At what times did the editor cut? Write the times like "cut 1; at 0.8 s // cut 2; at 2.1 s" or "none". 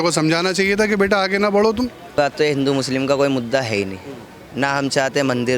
cut 1; at 2.2 s